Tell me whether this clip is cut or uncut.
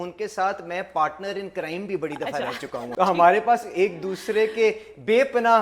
cut